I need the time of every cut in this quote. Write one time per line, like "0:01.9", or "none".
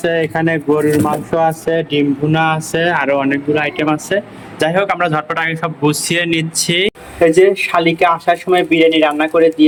none